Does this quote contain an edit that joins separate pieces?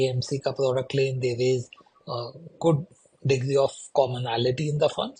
no; 0 cuts

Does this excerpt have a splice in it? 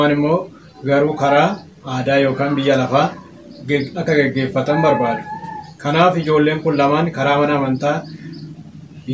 no; 0 cuts

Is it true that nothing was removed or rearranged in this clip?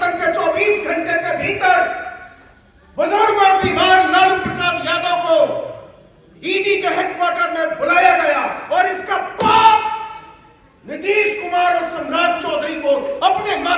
yes; 0 cuts

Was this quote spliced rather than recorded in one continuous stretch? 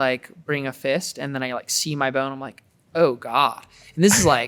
no; 0 cuts

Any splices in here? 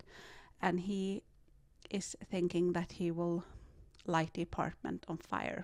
no; 0 cuts

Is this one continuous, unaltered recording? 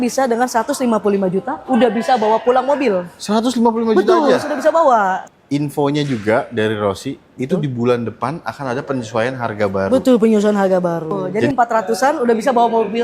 no; 2 cuts; at 5.2 s, 11.3 s

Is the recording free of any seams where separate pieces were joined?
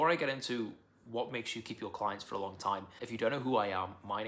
no; 1 cut; at 3.0 s

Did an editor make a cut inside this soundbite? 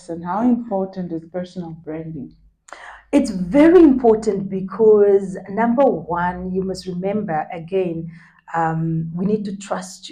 no; 0 cuts

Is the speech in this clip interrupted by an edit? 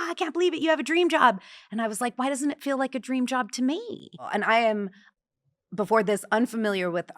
yes; 1 cut; at 4.2 s

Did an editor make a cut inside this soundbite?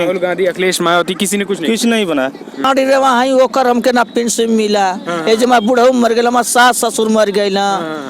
yes; 1 cut; at 2.7 s

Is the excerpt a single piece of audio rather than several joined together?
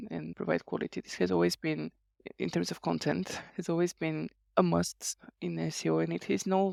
yes; 0 cuts

